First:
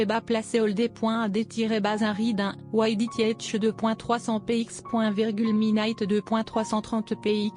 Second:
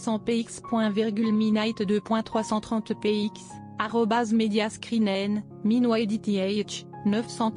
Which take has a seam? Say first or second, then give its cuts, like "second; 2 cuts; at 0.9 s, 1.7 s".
first; 2 cuts; at 2.2 s, 3.3 s